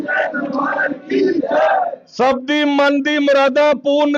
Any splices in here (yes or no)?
no